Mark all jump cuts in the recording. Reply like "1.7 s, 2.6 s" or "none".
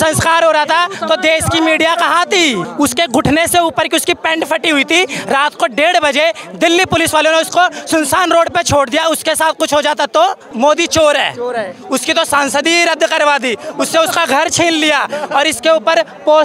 2.7 s, 10.4 s

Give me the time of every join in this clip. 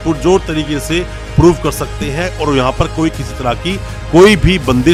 none

